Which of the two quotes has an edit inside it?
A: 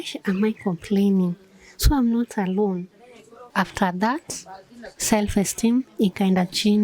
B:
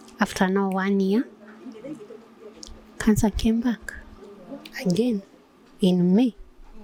A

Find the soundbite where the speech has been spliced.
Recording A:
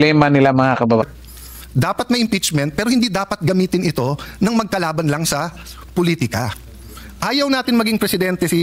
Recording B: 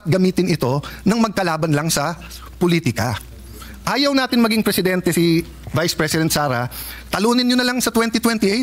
A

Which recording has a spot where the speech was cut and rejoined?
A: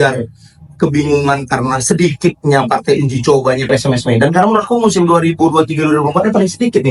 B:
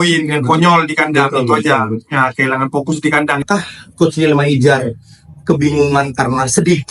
B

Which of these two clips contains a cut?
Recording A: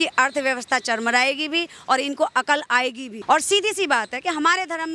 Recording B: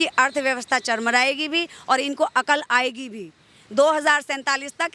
A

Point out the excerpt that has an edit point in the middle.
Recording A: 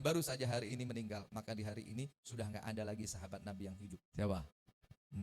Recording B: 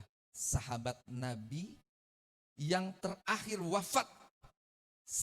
A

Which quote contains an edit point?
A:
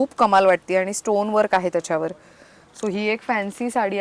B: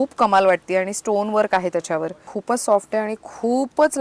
B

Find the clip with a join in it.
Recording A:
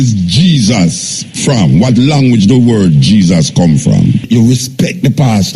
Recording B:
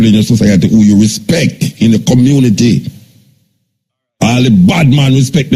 A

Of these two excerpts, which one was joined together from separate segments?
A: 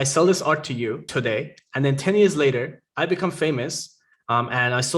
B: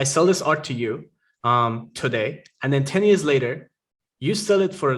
A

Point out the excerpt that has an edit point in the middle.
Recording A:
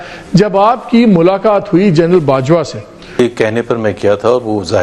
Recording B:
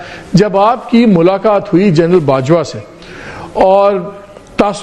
A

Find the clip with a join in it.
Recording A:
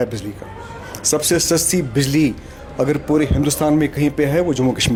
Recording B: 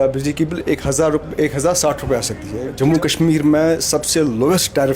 B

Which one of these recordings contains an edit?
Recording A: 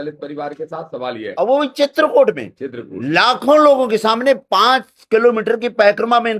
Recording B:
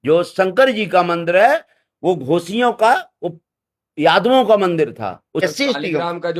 B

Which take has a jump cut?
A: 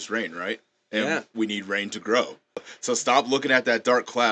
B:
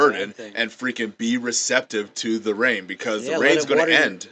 A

